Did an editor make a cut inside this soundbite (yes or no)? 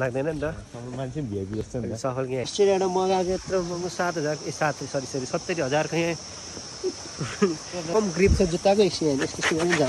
yes